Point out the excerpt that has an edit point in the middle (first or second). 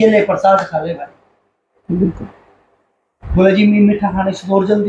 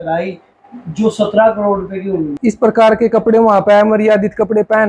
second